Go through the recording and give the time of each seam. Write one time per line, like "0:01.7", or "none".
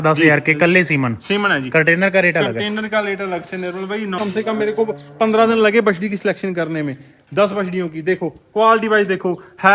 0:04.2